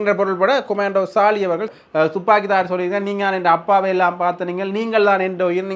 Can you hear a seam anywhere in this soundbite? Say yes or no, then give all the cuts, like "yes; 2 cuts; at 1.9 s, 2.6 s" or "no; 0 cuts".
yes; 1 cut; at 1.7 s